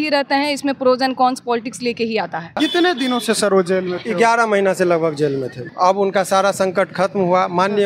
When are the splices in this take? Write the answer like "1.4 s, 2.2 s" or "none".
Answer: 2.6 s, 5.6 s